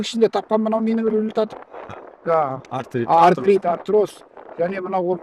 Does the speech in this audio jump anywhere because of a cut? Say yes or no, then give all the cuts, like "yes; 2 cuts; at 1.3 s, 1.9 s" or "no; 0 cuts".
no; 0 cuts